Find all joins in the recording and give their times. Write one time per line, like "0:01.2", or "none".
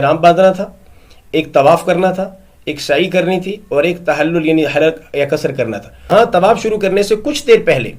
0:06.1

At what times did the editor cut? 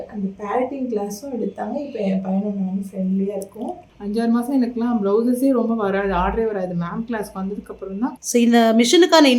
0:03.8
0:08.2

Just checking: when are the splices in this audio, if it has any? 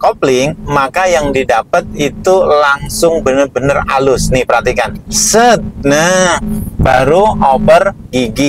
none

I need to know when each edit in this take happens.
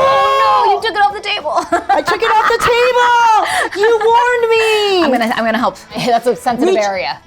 0:06.0

